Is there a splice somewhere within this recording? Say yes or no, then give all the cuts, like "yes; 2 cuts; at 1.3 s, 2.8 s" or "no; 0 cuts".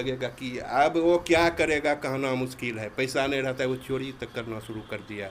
no; 0 cuts